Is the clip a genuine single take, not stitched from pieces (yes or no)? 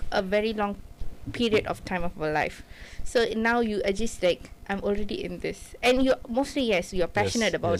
yes